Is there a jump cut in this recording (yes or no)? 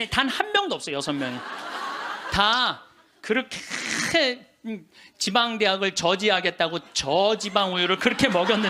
no